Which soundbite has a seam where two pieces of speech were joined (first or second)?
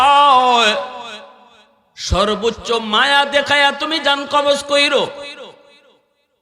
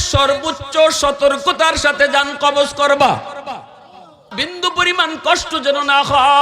second